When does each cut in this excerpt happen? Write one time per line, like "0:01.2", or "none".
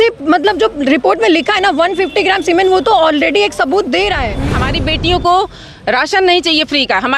0:04.6